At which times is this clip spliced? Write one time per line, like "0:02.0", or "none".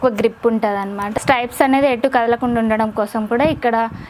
0:01.1